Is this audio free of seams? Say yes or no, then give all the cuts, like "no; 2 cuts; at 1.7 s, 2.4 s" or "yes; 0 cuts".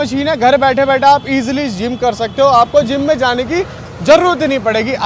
yes; 0 cuts